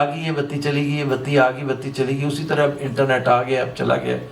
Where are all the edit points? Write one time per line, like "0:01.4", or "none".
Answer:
none